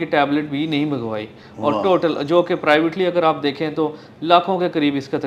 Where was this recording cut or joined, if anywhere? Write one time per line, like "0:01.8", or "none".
none